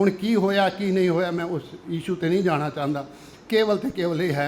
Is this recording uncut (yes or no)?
yes